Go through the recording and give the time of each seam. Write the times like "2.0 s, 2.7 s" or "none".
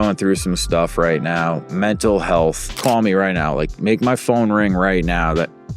2.8 s